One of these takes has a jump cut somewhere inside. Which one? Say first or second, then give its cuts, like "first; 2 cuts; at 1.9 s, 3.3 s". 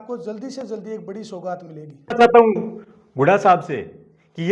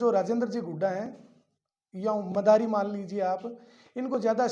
first; 1 cut; at 2.0 s